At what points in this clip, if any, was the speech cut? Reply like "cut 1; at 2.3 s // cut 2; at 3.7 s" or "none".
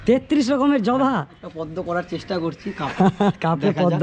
cut 1; at 1.3 s